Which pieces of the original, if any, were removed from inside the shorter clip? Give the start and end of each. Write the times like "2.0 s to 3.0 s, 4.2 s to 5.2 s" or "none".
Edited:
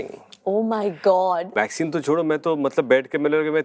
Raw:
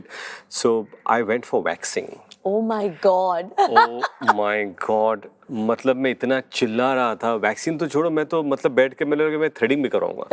3.5 s to 7.4 s